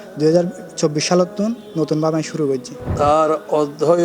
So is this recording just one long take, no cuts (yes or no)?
no